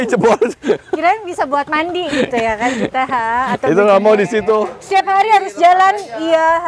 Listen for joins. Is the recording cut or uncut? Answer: cut